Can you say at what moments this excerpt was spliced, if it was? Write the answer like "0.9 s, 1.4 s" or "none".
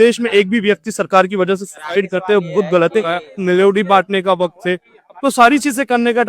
3.2 s